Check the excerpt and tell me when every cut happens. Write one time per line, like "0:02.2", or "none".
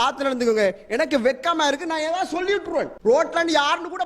0:02.9

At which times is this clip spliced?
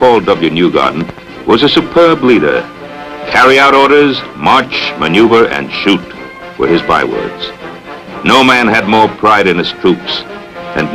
none

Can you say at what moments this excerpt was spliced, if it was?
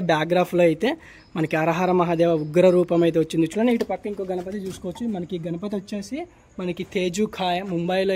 0:03.5

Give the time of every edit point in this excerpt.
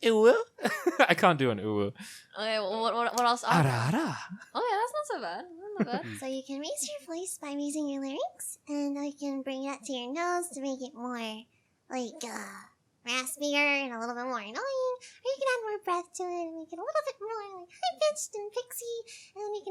0:06.1

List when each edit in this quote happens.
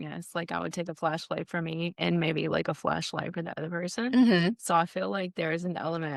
none

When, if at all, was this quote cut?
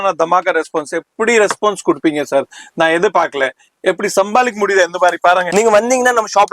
0:05.5

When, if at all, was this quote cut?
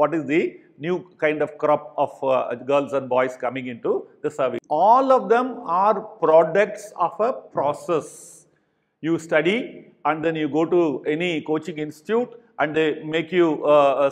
0:04.6

